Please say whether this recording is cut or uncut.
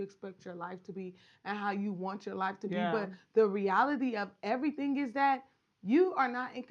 uncut